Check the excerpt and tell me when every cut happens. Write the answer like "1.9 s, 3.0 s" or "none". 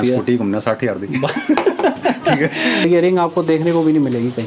2.8 s